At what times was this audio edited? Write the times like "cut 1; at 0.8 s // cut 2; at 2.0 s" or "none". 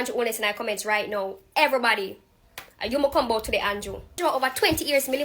cut 1; at 4.2 s